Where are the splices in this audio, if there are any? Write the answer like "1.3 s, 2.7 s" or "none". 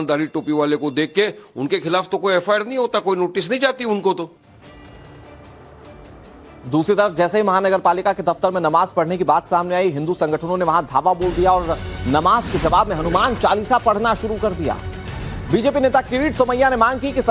6.8 s